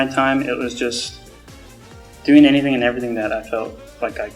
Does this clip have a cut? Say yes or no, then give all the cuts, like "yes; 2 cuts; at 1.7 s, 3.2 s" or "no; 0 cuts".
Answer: no; 0 cuts